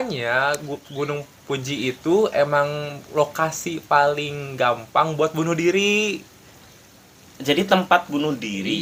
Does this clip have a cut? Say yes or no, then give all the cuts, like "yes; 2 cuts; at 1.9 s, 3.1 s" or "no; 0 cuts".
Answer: no; 0 cuts